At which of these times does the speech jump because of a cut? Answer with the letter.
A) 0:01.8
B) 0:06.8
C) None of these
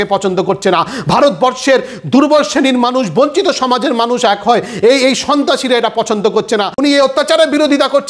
B